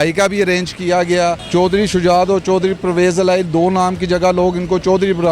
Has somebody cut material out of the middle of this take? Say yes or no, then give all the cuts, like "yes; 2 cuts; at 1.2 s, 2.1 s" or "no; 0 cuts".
yes; 1 cut; at 1.4 s